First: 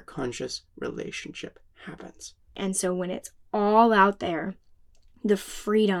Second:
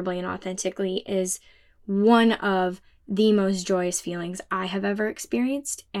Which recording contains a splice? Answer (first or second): first